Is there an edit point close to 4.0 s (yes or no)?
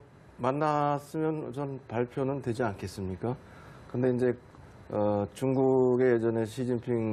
no